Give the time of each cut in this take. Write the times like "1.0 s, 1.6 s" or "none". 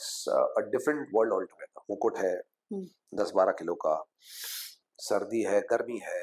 1.7 s